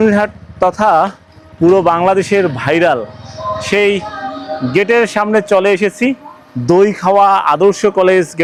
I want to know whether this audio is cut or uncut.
uncut